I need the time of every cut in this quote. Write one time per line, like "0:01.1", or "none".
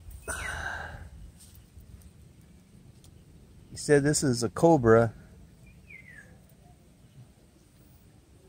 none